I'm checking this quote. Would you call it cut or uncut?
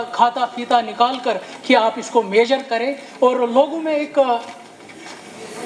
uncut